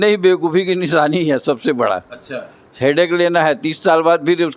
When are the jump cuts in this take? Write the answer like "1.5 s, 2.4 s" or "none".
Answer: none